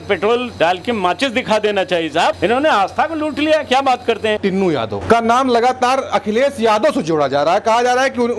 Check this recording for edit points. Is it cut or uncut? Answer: cut